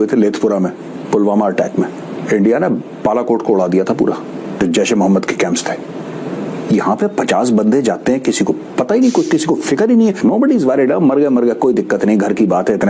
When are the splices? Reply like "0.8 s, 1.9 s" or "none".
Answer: 2.2 s, 4.6 s, 10.2 s

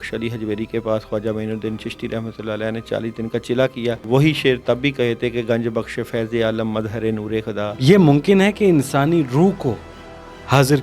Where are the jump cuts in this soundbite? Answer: 4.0 s, 7.7 s

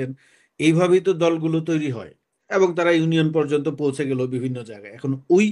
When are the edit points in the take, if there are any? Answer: 2.3 s

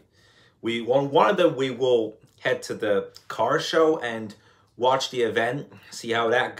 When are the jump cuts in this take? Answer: none

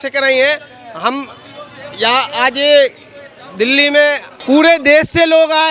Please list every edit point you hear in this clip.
4.3 s

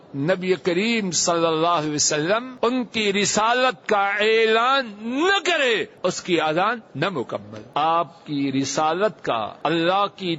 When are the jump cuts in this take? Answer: 2.5 s, 5.9 s, 7.6 s, 9.5 s

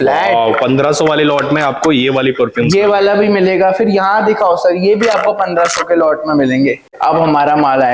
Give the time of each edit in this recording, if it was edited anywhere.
7.0 s

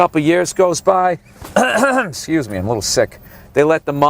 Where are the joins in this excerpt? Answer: 1.5 s

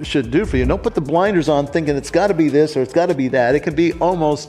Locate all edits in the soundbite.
none

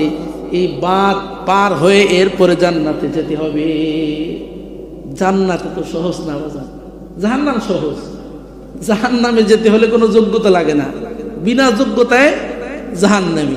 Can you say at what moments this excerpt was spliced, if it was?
none

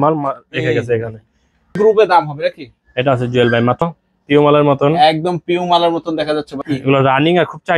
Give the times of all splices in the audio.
1.8 s, 3.9 s, 6.5 s

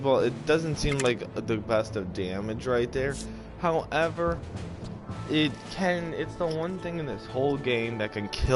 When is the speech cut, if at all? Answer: 6.9 s

